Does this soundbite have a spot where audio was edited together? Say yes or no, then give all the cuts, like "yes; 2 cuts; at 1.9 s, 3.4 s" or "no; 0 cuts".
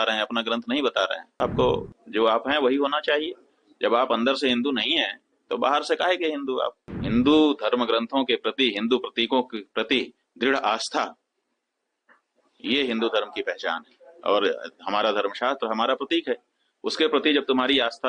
yes; 2 cuts; at 1.3 s, 6.8 s